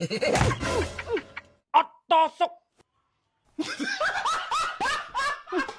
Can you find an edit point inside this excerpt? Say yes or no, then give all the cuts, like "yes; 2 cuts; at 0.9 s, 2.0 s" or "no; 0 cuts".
yes; 1 cut; at 2.7 s